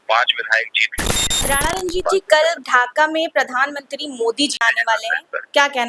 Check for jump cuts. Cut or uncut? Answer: cut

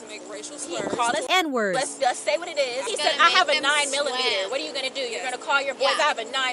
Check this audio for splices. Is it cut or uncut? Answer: cut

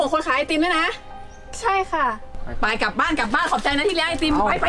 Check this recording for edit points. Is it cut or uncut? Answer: uncut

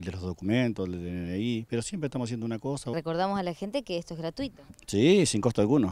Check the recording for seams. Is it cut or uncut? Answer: cut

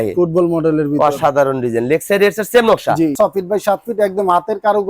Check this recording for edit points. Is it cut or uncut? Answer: cut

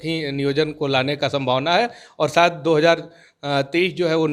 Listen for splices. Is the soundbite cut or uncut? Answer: uncut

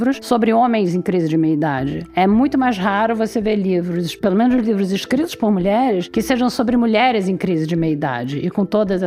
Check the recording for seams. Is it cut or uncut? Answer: uncut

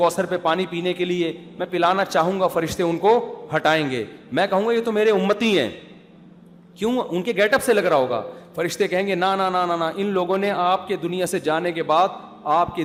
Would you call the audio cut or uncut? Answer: uncut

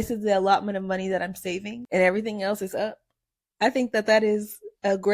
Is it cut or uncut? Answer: cut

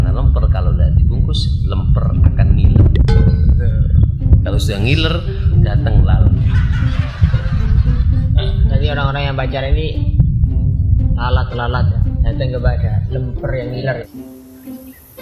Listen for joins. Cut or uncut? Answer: uncut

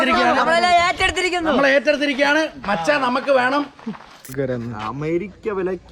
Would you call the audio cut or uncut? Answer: cut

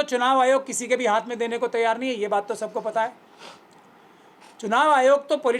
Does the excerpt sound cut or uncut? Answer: uncut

